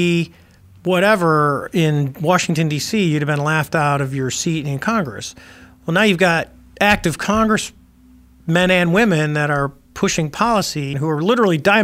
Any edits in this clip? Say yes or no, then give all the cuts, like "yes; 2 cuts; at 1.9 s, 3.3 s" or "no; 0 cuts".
yes; 1 cut; at 10.9 s